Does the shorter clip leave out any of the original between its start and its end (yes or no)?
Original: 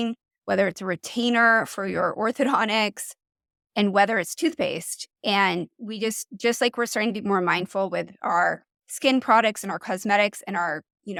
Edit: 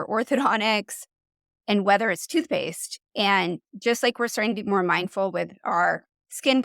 yes